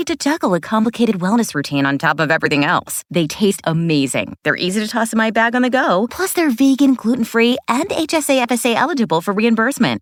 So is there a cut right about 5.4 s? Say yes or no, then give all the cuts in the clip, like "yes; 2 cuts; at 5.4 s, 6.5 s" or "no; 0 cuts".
no; 0 cuts